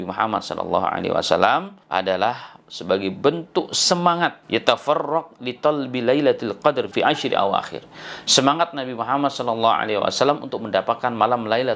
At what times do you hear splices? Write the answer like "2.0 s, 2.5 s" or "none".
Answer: 1.8 s, 4.4 s, 6.9 s